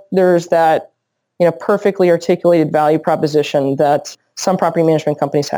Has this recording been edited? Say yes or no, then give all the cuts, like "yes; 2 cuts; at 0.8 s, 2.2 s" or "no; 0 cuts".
yes; 1 cut; at 4.1 s